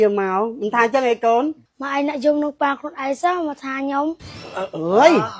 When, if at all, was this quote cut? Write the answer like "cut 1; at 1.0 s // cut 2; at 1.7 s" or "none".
cut 1; at 4.5 s